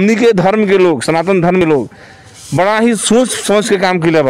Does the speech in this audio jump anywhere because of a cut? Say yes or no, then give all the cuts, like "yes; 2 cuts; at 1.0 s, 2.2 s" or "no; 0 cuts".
yes; 1 cut; at 1.6 s